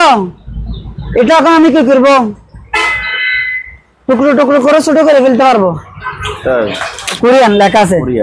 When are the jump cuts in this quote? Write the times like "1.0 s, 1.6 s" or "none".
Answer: 7.2 s

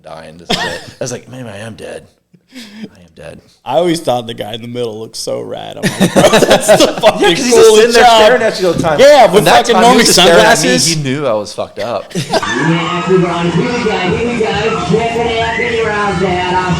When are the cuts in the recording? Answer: 3.5 s, 6.5 s, 12.4 s

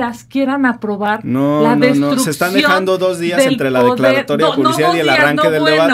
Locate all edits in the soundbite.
none

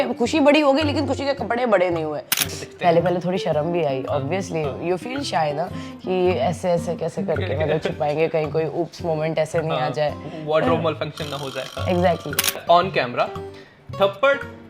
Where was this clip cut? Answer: 2.4 s, 12.6 s

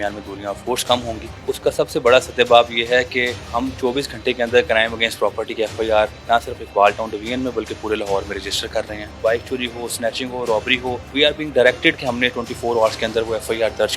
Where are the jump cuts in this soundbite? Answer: 1.3 s, 3.5 s, 6.2 s, 9.2 s, 11.0 s

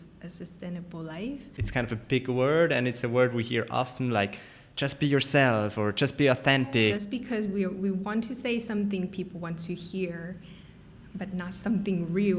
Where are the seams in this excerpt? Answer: 1.6 s, 6.9 s

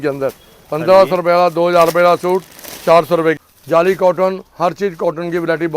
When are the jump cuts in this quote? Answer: 3.4 s

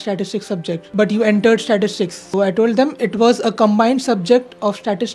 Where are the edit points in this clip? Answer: 0.9 s, 2.2 s

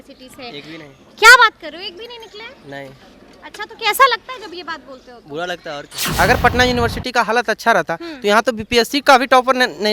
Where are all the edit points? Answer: 6.0 s

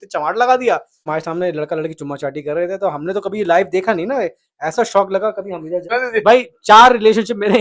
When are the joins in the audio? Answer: 1.1 s, 6.0 s

